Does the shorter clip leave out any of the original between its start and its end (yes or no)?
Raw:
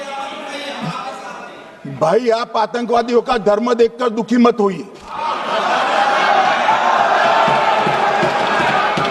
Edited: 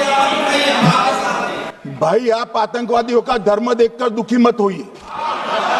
no